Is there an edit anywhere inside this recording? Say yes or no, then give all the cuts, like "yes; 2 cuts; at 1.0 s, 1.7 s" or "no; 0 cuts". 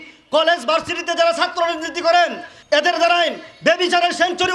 yes; 1 cut; at 2.5 s